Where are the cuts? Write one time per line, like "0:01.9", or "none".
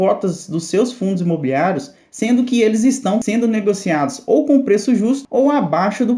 0:05.2